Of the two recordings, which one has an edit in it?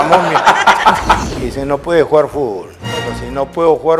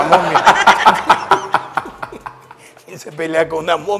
first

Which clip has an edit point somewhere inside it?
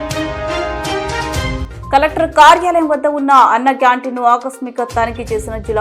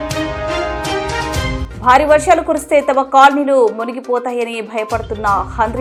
first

